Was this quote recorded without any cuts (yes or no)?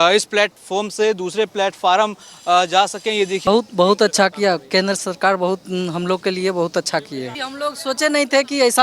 no